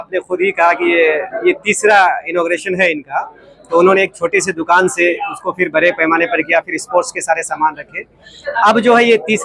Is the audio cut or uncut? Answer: uncut